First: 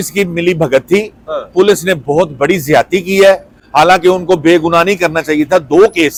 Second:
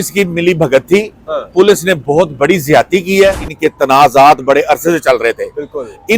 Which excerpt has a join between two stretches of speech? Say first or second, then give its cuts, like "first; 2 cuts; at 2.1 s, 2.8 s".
second; 1 cut; at 3.5 s